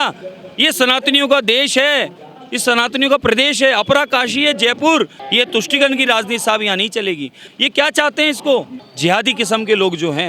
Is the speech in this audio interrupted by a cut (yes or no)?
yes